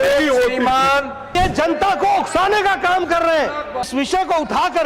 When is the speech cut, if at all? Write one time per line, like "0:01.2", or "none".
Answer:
0:01.3
0:03.9